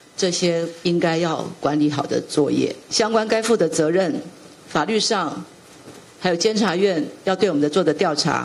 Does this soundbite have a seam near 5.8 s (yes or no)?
no